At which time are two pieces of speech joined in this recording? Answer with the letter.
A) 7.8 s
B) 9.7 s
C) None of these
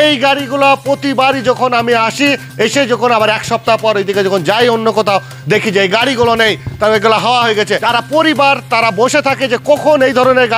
A